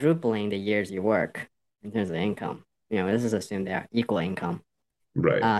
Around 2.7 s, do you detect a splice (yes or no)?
yes